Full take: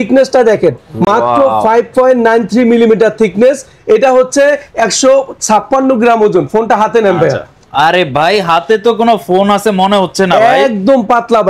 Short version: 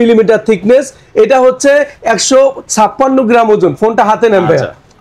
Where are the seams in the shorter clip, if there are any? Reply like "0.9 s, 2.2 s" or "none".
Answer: none